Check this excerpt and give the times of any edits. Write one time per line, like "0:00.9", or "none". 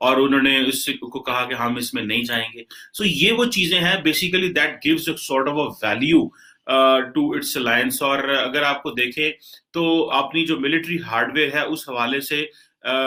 none